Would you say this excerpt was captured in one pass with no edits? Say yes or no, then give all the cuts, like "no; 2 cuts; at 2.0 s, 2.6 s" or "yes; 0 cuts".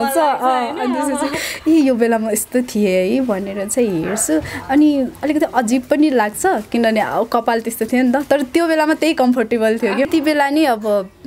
no; 1 cut; at 10.1 s